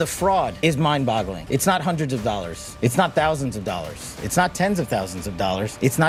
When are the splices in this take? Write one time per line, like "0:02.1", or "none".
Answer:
none